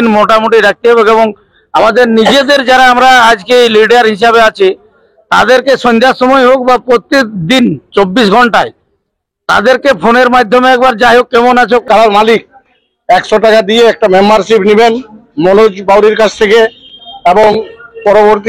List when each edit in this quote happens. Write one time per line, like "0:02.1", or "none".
0:11.8